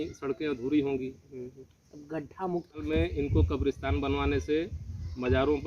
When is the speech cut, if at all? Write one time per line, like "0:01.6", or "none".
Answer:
0:02.9

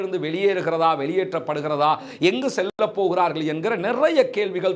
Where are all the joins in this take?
none

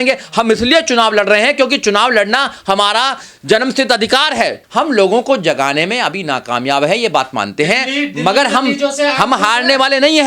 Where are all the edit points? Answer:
0:04.6

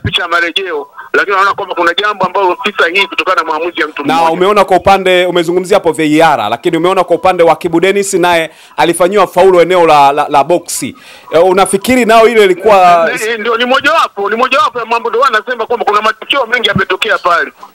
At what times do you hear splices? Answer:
0:04.0

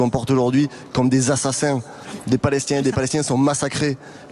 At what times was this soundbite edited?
0:02.0

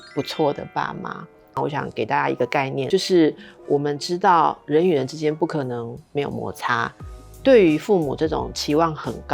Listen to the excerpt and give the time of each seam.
0:01.6

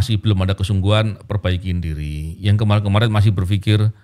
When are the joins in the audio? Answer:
none

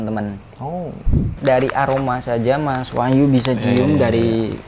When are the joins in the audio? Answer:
0:01.3

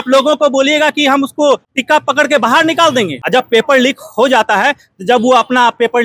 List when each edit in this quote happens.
0:01.7
0:03.2

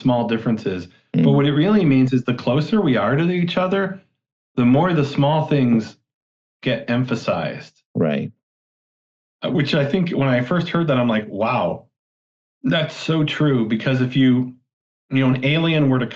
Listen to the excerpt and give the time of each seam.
none

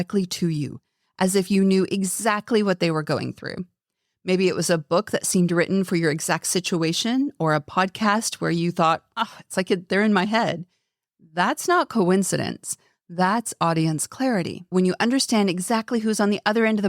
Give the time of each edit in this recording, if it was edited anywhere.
0:14.7

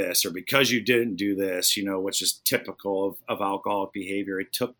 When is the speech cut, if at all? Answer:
none

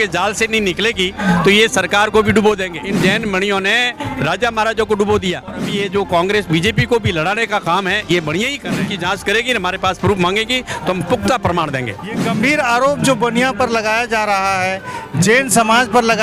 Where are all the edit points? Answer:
0:02.7
0:05.6
0:08.9
0:12.2

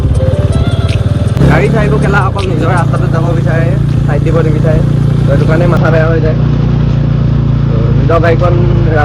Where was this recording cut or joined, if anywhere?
0:01.4

